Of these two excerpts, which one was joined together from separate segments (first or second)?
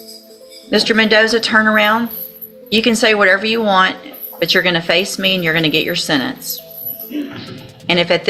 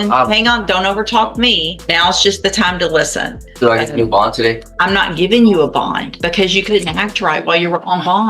second